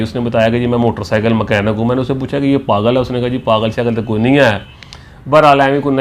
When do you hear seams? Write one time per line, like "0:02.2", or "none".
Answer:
none